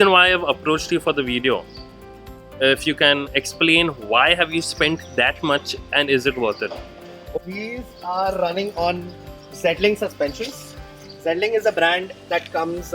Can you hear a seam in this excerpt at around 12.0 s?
no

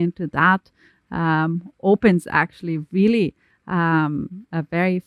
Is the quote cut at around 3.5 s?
no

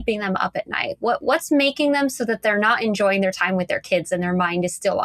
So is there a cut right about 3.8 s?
no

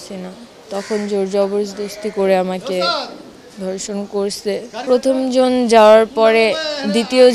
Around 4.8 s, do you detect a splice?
yes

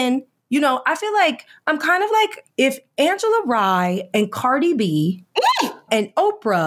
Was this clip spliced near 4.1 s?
no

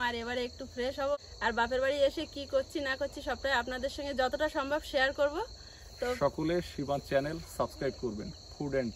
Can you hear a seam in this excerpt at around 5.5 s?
no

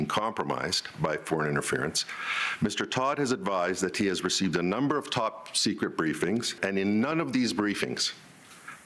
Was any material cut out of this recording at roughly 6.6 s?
yes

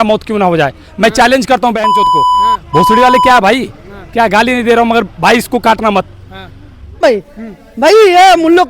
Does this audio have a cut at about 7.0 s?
yes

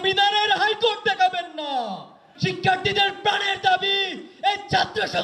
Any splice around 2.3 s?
yes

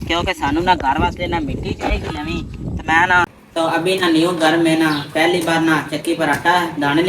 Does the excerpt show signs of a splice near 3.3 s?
yes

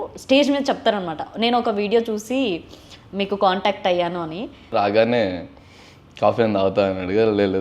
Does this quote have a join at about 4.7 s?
yes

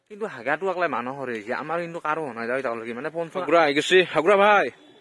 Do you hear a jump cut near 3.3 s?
yes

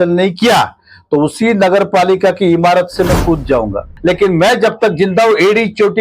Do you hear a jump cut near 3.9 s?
yes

